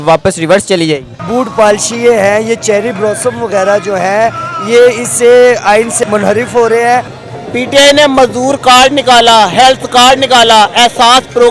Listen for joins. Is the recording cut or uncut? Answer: cut